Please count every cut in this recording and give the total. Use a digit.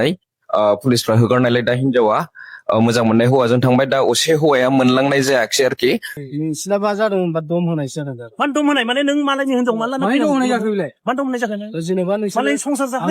1